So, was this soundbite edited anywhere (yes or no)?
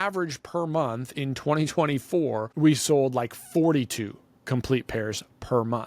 yes